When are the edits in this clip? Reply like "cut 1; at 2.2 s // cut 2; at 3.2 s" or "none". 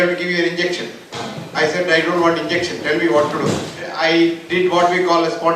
cut 1; at 3.8 s

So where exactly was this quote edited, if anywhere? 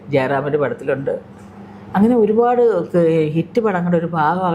none

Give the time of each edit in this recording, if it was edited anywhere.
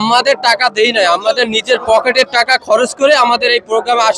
none

